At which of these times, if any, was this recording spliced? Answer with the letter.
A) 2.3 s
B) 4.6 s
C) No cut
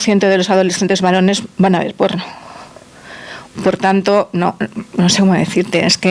C